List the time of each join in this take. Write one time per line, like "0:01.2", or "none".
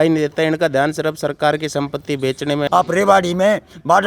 0:02.7